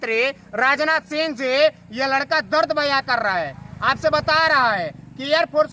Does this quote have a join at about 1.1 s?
no; 0 cuts

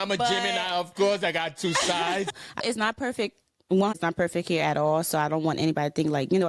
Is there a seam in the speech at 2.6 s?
yes; 1 cut; at 2.6 s

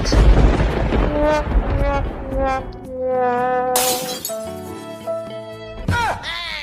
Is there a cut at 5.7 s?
yes; 1 cut; at 5.7 s

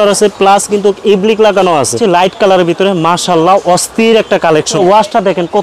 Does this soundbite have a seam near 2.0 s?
yes; 2 cuts; at 2.0 s, 4.7 s

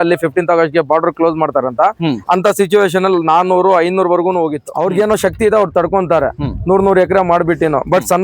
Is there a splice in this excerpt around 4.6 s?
yes; 1 cut; at 4.6 s

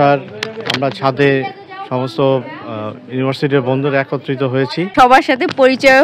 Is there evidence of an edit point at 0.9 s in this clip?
no; 1 cut; at 4.9 s

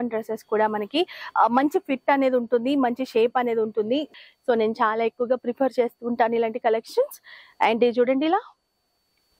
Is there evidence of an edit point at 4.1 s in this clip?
yes; 1 cut; at 4.1 s

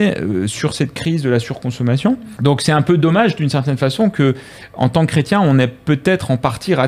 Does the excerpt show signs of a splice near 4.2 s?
no; 1 cut; at 2.3 s

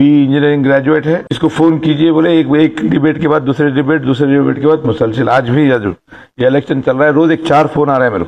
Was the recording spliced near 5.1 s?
no; 1 cut; at 1.3 s

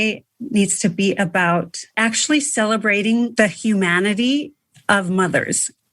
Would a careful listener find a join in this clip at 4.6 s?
no; 2 cuts; at 1.9 s, 3.3 s

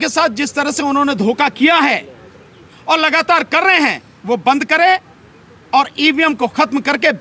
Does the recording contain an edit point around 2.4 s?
no; 0 cuts

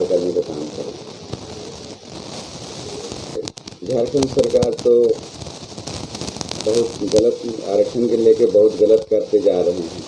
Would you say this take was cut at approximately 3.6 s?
yes; 1 cut; at 3.6 s

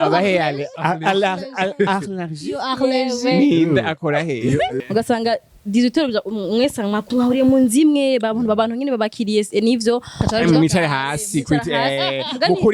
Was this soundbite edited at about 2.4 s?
no; 1 cut; at 4.8 s

